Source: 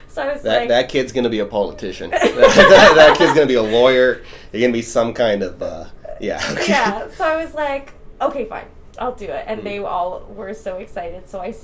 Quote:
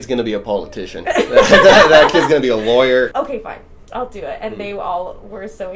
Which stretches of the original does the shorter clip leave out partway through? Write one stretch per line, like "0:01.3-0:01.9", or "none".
0:04.2-0:08.2